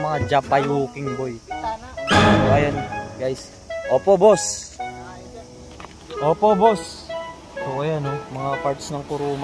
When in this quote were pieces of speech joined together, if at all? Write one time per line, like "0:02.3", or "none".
none